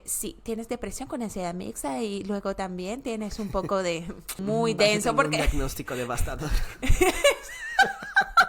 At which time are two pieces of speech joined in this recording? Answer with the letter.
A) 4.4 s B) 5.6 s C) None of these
A